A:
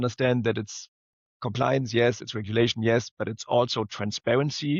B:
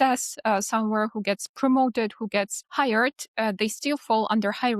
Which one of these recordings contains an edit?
B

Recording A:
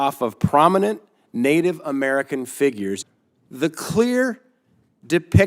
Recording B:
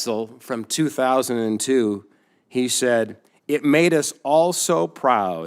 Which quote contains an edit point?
A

